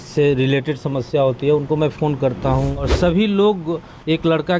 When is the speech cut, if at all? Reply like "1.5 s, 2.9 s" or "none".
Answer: 2.9 s